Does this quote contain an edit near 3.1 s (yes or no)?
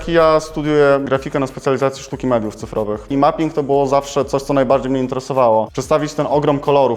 yes